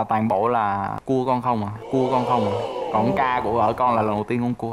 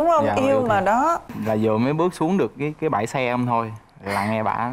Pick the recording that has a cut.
second; 1 cut; at 1.3 s

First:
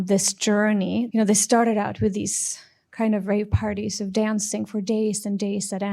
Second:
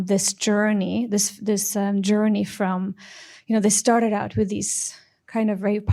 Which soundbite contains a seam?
first; 1 cut; at 1.1 s

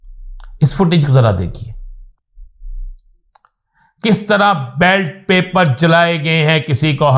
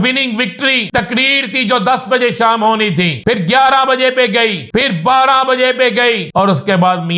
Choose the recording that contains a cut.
second; 4 cuts; at 1.0 s, 3.4 s, 4.9 s, 6.3 s

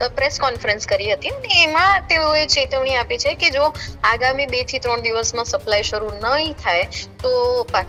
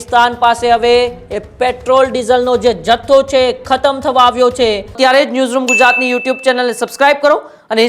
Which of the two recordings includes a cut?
second; 1 cut; at 4.9 s

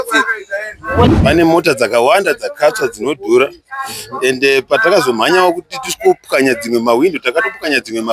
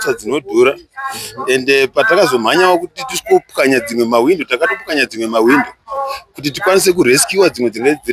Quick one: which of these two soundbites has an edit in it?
first; 1 cut; at 1.1 s

